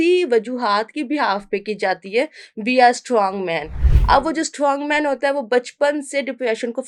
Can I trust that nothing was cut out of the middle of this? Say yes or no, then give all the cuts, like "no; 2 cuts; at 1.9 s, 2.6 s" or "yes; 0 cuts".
yes; 0 cuts